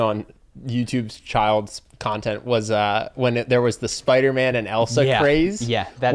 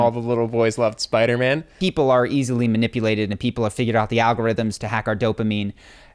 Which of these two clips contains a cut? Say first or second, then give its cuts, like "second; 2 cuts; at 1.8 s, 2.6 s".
second; 1 cut; at 1.7 s